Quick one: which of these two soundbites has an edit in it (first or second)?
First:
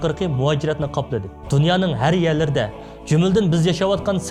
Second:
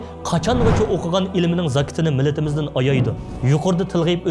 second